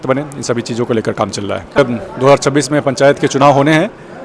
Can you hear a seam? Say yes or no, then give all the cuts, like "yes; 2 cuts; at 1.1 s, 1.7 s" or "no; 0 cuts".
yes; 1 cut; at 1.8 s